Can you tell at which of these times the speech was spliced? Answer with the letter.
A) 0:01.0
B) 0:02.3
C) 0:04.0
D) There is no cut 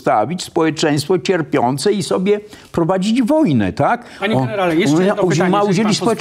D